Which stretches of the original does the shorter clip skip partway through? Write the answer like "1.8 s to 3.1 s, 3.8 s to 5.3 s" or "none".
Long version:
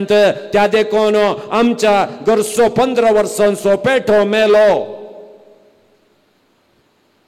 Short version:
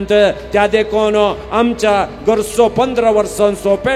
none